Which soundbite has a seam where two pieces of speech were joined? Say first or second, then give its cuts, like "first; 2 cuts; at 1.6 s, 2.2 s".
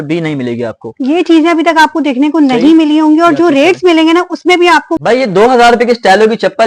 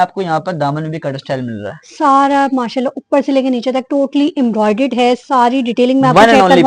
first; 1 cut; at 5.2 s